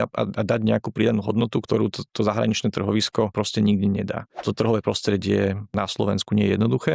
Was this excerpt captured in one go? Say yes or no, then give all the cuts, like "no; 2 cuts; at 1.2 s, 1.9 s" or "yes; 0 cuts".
no; 4 cuts; at 1.6 s, 3.3 s, 4.4 s, 5.7 s